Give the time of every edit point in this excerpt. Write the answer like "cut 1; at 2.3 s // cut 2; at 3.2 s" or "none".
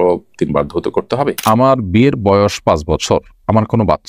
cut 1; at 1.4 s